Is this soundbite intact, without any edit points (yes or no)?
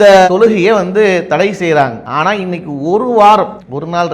no